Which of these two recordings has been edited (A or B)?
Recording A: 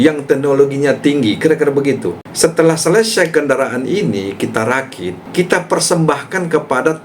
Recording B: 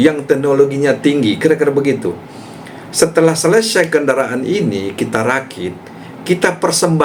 A